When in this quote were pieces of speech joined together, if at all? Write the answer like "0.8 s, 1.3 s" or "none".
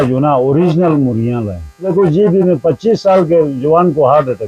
1.9 s